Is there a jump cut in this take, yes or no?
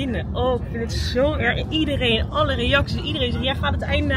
no